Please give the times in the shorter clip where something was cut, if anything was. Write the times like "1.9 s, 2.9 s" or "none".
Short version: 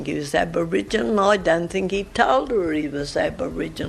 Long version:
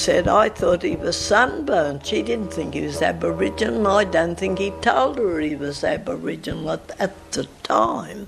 none